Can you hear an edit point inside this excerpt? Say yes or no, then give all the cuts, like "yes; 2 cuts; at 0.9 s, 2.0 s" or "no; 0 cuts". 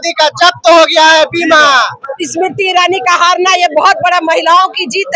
yes; 1 cut; at 2.0 s